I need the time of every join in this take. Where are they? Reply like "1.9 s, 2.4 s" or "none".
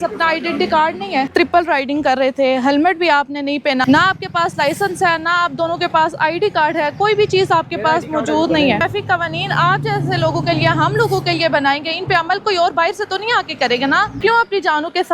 1.3 s, 3.8 s, 8.8 s, 14.2 s